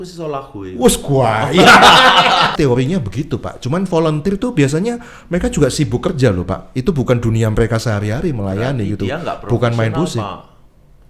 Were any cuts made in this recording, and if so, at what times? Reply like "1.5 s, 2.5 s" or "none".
2.5 s